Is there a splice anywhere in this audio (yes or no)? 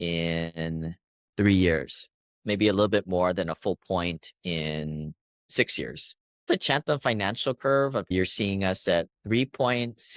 yes